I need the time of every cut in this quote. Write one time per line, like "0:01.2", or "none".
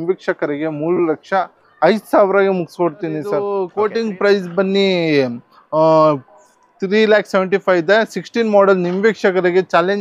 0:03.7